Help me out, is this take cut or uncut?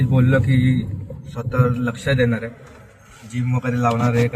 uncut